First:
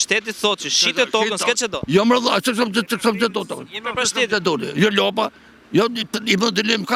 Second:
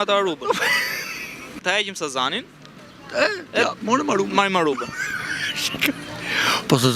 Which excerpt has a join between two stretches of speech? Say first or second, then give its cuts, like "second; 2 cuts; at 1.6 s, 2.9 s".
second; 1 cut; at 1.6 s